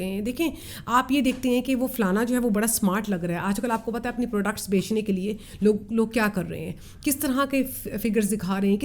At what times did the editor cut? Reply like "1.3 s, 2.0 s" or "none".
none